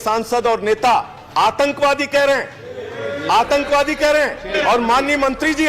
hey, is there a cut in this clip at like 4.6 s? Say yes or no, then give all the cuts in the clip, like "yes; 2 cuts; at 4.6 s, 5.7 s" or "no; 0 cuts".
yes; 2 cuts; at 1.2 s, 4.6 s